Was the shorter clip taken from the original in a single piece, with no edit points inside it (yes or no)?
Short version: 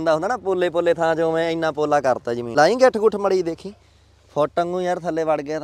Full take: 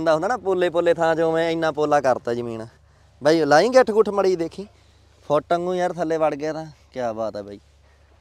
no